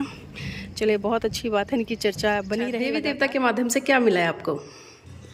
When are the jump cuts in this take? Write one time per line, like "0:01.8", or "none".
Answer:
0:03.0